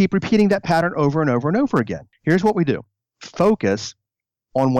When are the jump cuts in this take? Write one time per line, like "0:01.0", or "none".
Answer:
0:02.1